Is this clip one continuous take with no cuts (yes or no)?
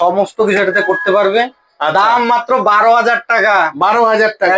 yes